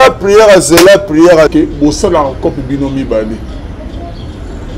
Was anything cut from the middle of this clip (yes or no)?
yes